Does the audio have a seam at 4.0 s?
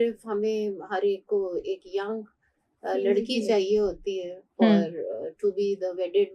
no; 0 cuts

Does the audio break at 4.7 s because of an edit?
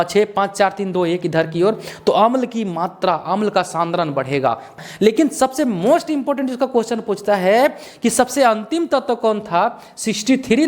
yes; 1 cut; at 4.7 s

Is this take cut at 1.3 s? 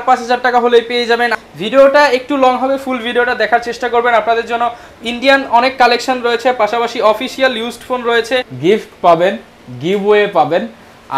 yes; 2 cuts; at 1.3 s, 8.5 s

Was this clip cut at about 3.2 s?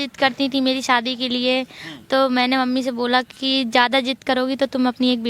no; 0 cuts

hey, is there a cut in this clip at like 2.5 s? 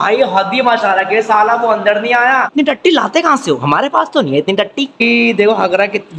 yes; 2 cuts; at 2.5 s, 5.0 s

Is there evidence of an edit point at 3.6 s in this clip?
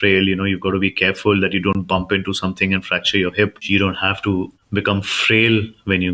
yes; 2 cuts; at 3.6 s, 4.6 s

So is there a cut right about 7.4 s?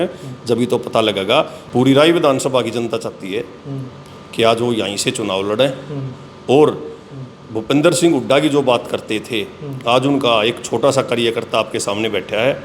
no; 1 cut; at 1.6 s

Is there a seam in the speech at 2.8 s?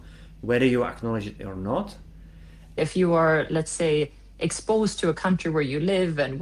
yes; 1 cut; at 2.8 s

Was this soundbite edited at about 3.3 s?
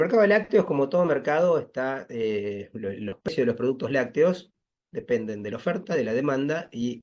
yes; 1 cut; at 3.3 s

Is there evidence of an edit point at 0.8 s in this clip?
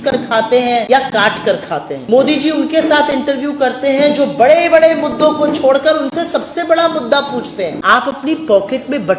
yes; 3 cuts; at 0.8 s, 2.0 s, 7.8 s

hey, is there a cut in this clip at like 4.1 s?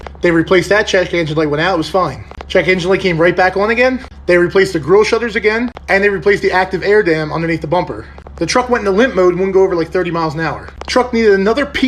no; 2 cuts; at 8.2 s, 10.7 s

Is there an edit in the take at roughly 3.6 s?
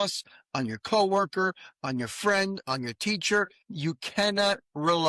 yes; 1 cut; at 3.6 s

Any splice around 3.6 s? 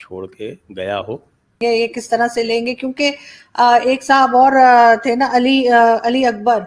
no; 1 cut; at 1.6 s

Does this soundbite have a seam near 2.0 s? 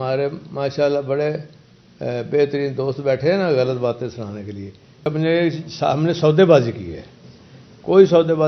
no; 1 cut; at 5.0 s

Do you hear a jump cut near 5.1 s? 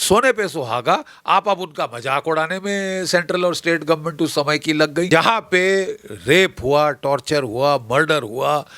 yes; 1 cut; at 5.1 s

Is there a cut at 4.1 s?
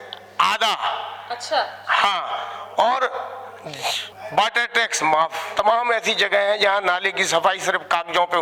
yes; 2 cuts; at 4.1 s, 5.5 s

